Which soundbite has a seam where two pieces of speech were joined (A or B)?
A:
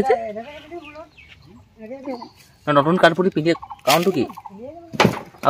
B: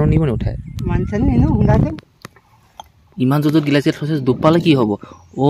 B